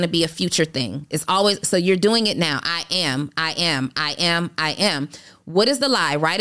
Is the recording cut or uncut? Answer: uncut